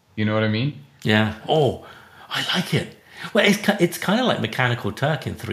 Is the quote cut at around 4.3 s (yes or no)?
no